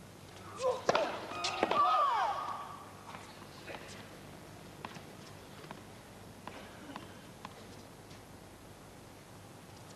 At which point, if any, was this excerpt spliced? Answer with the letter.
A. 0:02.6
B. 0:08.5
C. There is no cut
B